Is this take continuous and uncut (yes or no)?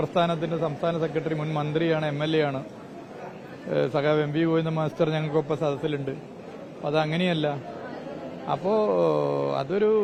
yes